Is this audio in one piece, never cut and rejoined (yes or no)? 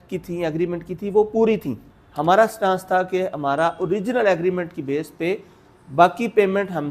no